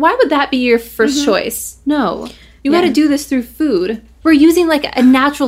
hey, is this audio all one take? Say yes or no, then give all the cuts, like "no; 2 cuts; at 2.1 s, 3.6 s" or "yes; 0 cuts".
no; 2 cuts; at 0.9 s, 4.1 s